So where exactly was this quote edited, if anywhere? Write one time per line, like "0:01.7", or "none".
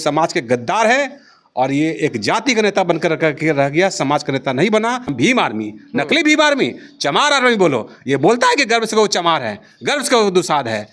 0:05.1